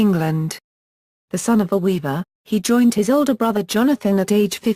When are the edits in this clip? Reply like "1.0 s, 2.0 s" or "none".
2.4 s